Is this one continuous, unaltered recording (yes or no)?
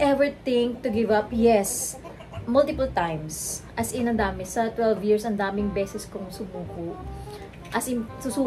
yes